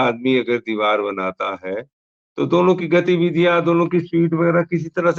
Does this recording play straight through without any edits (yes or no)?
yes